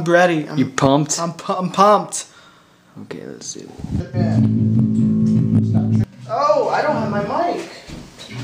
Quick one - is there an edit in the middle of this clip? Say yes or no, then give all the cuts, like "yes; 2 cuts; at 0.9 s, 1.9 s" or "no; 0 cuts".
yes; 2 cuts; at 4.0 s, 6.1 s